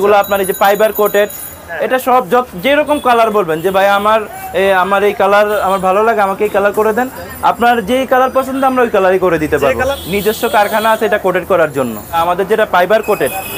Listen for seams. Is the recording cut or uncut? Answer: cut